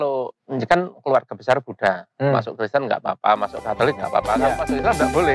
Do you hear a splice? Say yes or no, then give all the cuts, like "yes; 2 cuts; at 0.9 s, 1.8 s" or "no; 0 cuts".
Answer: no; 0 cuts